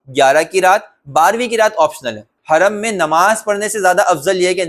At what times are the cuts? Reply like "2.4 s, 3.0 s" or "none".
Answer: 2.3 s